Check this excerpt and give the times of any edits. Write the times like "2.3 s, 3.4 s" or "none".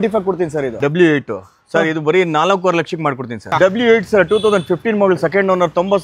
0.8 s, 3.4 s